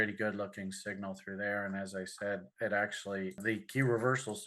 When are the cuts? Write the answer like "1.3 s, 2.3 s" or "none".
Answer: 3.4 s